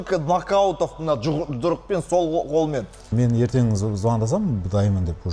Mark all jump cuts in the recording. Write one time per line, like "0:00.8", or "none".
0:03.1